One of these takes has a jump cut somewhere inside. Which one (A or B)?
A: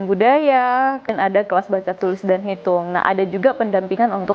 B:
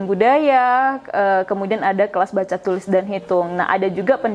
A